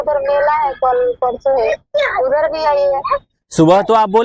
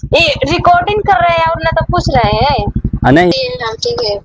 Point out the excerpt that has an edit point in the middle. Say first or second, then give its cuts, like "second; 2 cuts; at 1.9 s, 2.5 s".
second; 1 cut; at 3.3 s